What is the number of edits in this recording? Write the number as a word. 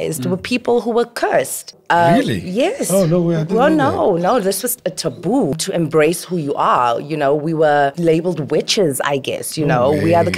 three